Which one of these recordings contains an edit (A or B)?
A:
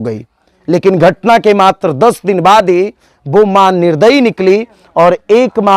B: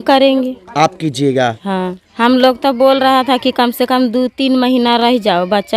B